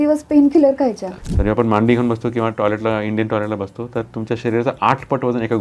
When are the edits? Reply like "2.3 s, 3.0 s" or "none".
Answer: 1.1 s